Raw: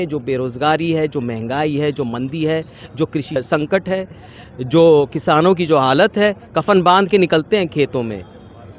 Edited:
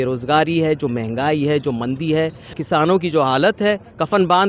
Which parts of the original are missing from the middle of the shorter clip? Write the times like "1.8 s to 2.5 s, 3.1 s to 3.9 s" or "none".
2.9 s to 5.1 s